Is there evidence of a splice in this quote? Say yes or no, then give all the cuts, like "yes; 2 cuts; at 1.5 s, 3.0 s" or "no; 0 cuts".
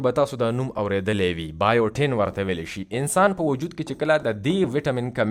no; 0 cuts